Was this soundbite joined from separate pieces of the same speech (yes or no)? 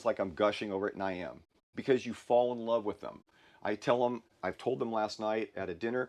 no